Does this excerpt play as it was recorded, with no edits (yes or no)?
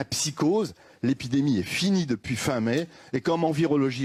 yes